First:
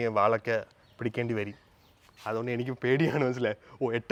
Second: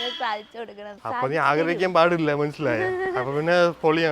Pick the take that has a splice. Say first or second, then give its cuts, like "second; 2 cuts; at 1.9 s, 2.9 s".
second; 1 cut; at 0.9 s